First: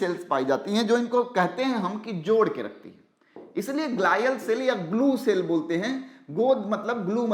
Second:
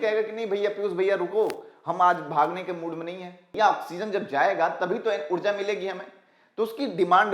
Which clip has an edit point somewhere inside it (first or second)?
second